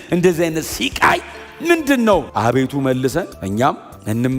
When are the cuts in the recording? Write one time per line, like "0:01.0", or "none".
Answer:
0:02.3